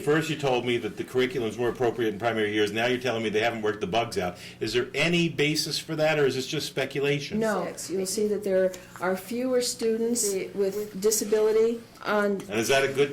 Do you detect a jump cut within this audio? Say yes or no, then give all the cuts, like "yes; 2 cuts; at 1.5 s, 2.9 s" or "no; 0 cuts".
yes; 3 cuts; at 7.8 s, 10.4 s, 11.9 s